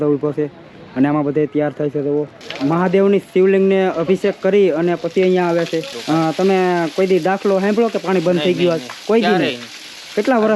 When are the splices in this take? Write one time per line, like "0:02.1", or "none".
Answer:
0:02.5
0:05.9

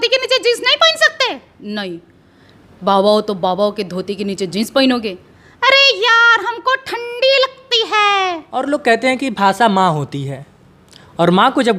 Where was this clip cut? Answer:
0:08.4

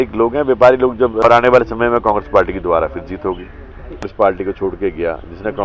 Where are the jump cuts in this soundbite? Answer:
0:01.2
0:04.0

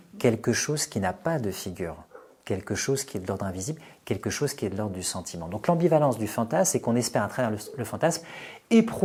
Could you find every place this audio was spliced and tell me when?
none

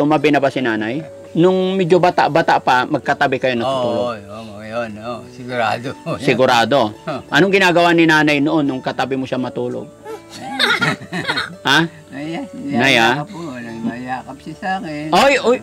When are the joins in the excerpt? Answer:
0:01.2

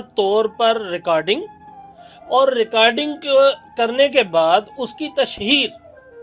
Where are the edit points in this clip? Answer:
none

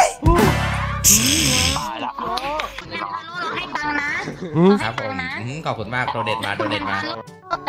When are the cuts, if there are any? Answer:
none

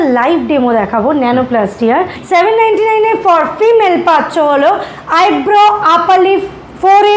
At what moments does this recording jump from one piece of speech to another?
0:02.2

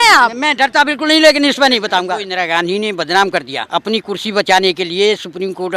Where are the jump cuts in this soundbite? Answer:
0:02.3
0:03.6

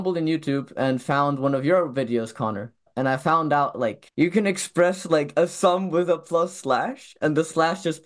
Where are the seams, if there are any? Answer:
none

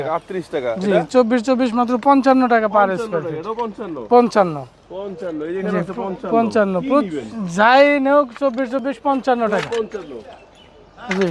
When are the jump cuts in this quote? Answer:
none

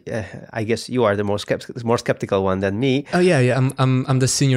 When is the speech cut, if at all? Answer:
0:03.1

